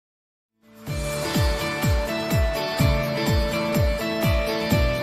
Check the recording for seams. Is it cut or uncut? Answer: uncut